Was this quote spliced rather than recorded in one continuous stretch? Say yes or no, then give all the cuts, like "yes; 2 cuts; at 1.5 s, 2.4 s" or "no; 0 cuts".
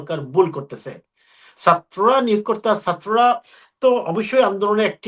no; 0 cuts